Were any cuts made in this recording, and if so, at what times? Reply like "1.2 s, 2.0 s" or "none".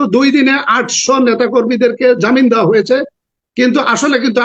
none